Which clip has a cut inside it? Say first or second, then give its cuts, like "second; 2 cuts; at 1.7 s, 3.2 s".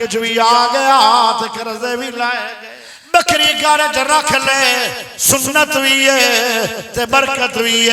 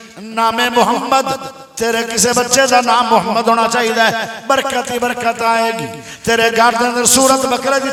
first; 1 cut; at 2.6 s